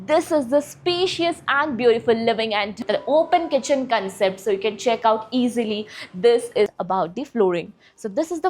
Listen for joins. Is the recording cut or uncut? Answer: cut